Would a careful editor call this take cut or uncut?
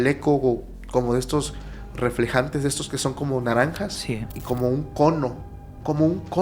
cut